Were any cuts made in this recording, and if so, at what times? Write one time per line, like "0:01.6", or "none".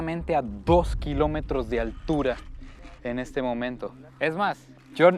none